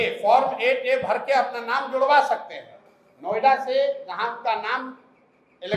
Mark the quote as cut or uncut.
uncut